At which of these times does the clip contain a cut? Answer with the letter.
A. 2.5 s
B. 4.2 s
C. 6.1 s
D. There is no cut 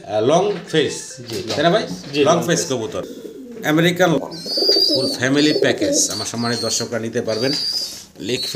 B